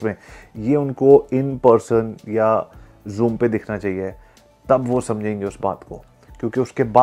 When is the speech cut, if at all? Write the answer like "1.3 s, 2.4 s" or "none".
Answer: none